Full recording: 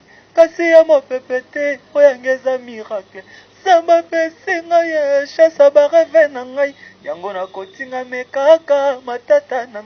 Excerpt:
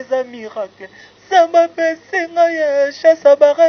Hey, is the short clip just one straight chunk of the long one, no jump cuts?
yes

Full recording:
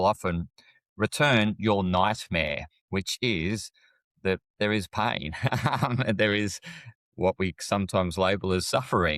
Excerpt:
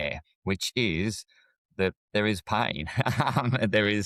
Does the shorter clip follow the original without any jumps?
yes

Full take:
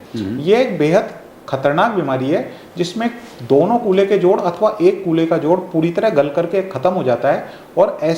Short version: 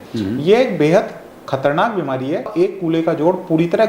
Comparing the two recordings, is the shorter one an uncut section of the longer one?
no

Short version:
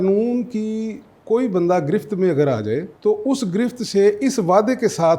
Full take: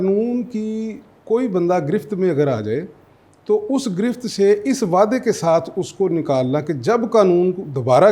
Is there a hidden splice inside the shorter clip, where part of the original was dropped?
yes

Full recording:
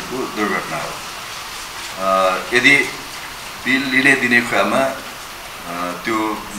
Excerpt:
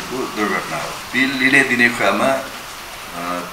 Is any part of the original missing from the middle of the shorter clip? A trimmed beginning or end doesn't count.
yes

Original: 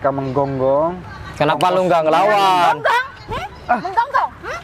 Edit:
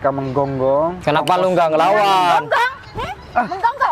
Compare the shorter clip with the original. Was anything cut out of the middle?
yes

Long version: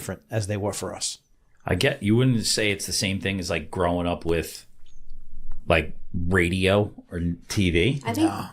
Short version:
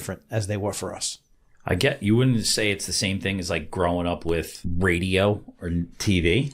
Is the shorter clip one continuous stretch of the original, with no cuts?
no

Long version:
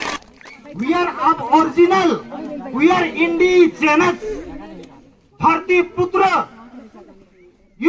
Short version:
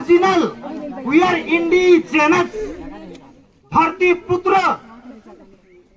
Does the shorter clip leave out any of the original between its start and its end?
no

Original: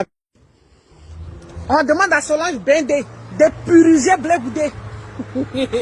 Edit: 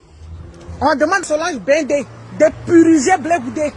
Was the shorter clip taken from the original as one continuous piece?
no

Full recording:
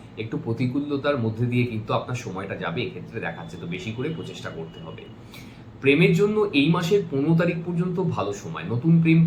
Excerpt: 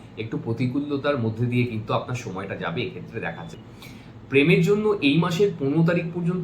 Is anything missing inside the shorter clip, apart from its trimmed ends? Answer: yes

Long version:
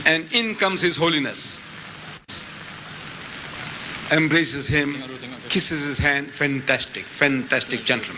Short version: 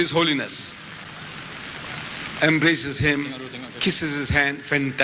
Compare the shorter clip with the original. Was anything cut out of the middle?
yes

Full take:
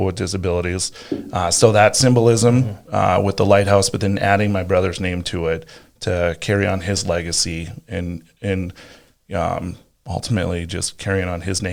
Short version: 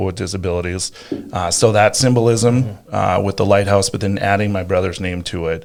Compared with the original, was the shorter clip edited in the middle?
no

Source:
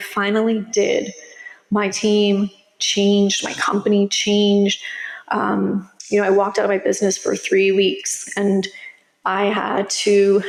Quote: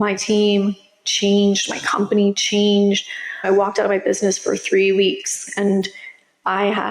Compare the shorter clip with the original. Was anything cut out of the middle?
yes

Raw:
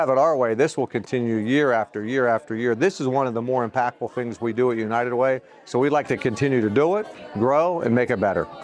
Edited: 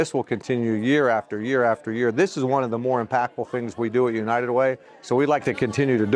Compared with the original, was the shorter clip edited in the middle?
no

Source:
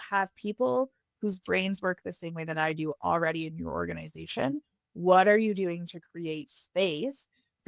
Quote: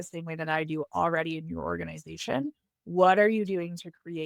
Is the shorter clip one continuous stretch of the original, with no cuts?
yes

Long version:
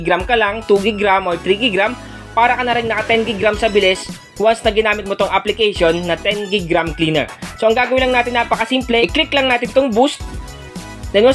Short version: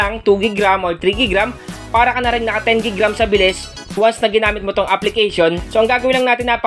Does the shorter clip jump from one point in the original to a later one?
yes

